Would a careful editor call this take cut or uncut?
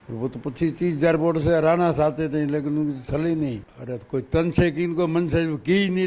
cut